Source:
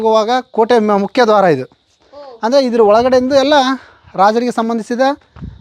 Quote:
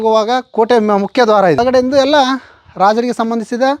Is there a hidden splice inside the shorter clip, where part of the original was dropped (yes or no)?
yes